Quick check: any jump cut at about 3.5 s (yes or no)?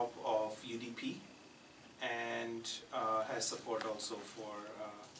yes